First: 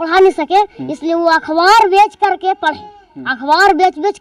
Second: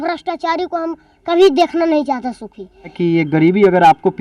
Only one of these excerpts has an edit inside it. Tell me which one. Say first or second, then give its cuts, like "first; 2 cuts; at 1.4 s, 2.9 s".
second; 1 cut; at 2.9 s